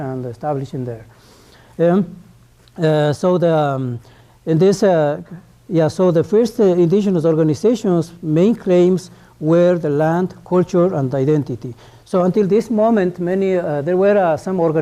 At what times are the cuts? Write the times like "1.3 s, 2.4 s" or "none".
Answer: 8.7 s